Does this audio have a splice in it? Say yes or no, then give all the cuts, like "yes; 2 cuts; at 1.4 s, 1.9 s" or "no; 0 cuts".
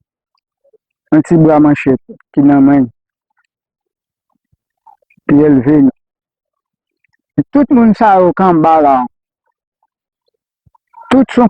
yes; 1 cut; at 7.4 s